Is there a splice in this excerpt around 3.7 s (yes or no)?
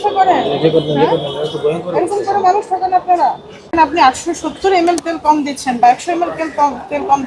yes